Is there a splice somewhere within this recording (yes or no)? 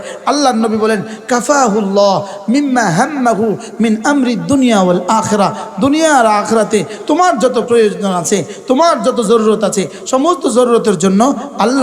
no